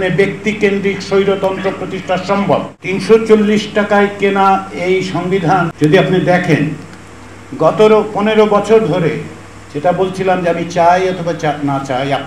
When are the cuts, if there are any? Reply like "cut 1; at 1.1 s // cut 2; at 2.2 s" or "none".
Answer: cut 1; at 2.7 s // cut 2; at 5.7 s